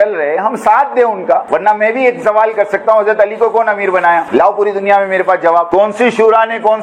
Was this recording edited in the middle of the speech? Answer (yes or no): yes